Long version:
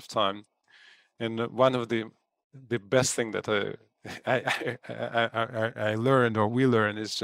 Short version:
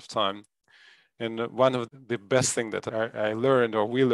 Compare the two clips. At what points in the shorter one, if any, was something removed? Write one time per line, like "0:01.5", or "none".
0:01.9
0:02.9